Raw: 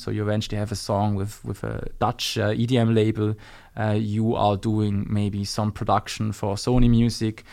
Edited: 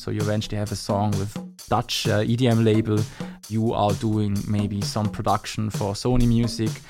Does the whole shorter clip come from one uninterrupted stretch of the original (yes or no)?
no